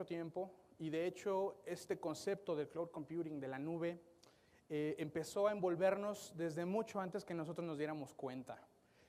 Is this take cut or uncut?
uncut